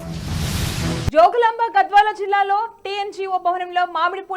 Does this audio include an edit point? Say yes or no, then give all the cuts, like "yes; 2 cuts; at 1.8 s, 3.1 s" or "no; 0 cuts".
yes; 1 cut; at 1.1 s